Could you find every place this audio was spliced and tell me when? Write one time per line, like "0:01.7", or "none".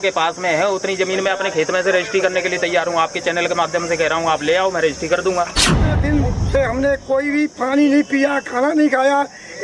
0:05.9